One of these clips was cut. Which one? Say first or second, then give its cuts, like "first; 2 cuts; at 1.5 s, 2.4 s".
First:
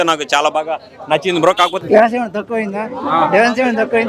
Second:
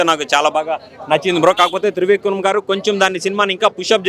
first; 1 cut; at 1.8 s